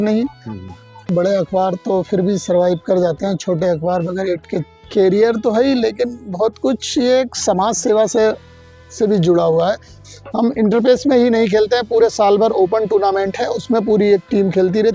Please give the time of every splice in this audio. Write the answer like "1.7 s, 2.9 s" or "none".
1.0 s, 4.8 s, 10.0 s